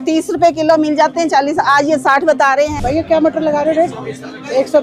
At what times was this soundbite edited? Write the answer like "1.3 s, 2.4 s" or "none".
2.7 s